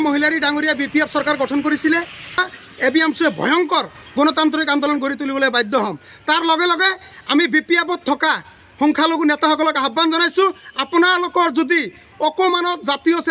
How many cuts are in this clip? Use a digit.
1